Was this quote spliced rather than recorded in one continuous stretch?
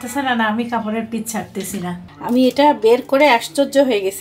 yes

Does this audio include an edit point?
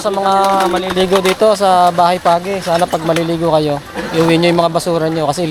no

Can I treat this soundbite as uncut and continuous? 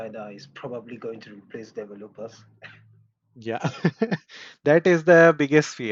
yes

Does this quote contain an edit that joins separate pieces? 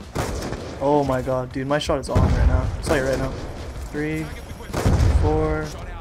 no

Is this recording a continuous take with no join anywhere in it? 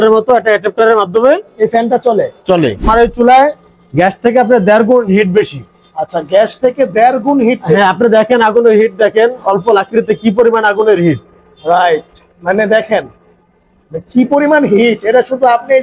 no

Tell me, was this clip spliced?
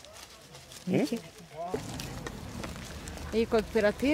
yes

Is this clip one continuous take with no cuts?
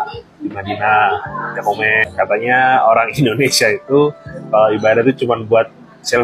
yes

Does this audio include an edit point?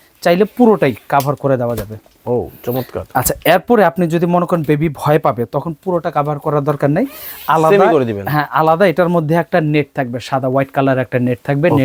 no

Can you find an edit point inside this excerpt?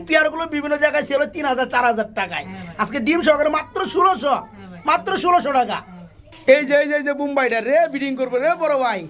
no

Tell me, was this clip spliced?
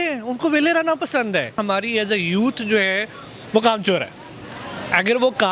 yes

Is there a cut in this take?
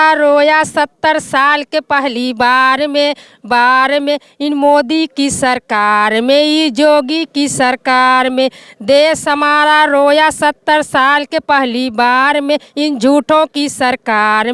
no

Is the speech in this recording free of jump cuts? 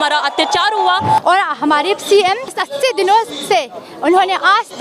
no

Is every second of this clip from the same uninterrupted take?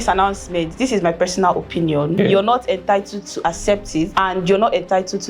no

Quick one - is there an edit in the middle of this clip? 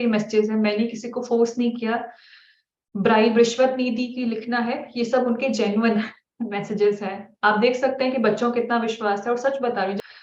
no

